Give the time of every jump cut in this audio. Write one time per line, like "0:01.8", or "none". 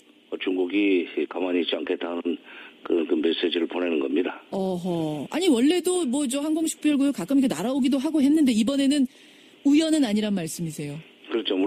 0:04.8